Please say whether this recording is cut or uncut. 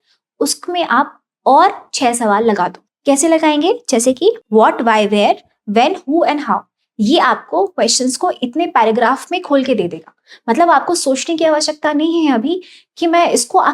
cut